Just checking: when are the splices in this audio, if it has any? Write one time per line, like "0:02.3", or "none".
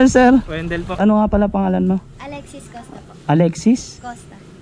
0:00.9